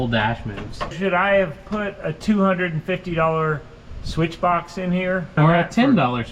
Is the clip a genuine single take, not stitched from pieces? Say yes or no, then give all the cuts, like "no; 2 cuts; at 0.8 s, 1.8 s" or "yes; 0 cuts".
no; 3 cuts; at 0.9 s, 2.1 s, 5.3 s